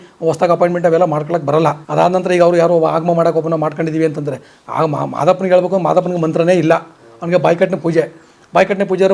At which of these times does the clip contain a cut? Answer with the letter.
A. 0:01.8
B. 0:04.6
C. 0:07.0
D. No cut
A